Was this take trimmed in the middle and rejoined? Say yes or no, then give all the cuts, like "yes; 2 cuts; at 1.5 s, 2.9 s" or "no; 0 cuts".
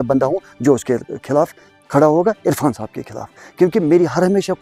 no; 0 cuts